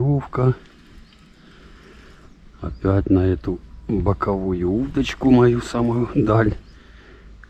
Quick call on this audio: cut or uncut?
uncut